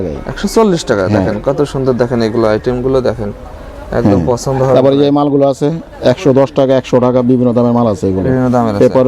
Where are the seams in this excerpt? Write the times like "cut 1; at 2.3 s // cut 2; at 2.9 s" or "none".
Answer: none